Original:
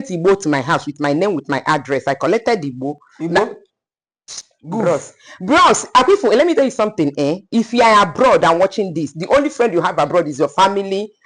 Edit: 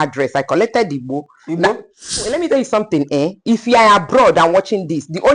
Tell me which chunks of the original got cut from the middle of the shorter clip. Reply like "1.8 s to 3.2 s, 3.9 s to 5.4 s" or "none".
4.0 s to 6.4 s